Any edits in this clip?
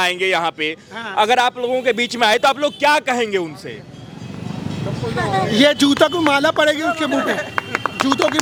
no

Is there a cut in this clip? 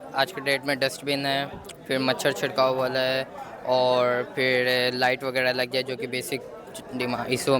no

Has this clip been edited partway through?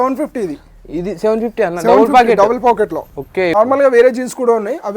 yes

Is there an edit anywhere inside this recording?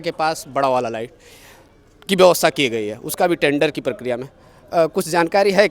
no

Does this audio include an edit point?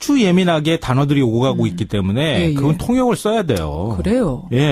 yes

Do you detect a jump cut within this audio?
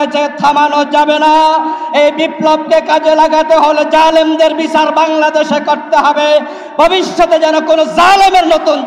no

